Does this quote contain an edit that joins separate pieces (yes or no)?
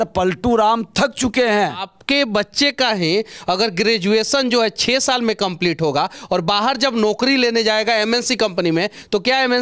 yes